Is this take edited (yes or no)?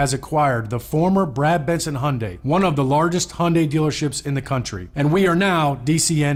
no